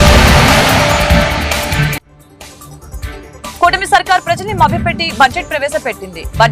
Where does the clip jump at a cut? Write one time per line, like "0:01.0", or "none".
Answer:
0:03.1